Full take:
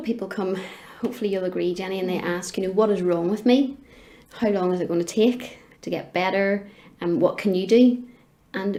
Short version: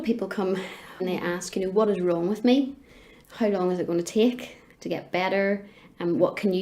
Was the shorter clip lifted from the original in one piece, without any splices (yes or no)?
no